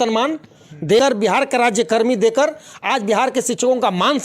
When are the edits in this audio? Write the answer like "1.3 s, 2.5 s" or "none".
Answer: 1.0 s